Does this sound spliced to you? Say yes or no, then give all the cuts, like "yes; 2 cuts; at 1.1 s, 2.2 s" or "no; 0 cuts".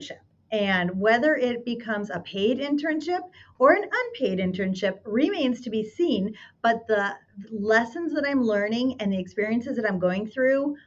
no; 0 cuts